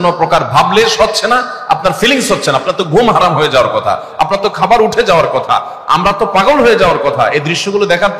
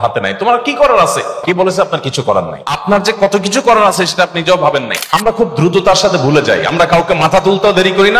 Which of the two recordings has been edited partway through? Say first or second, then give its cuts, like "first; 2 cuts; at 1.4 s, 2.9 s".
second; 3 cuts; at 1.4 s, 2.8 s, 5.2 s